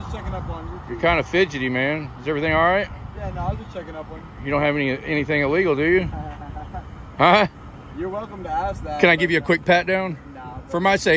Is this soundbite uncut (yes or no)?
yes